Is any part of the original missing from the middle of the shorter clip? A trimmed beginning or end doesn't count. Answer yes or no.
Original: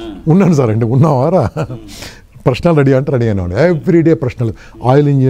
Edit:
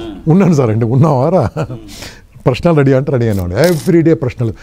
no